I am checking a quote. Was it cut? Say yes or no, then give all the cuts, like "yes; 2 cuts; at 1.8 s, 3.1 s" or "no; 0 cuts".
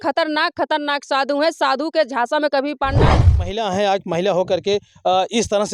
yes; 1 cut; at 3.2 s